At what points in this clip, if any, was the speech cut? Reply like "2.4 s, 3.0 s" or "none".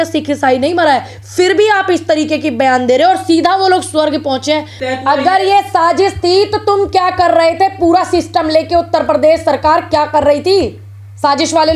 4.8 s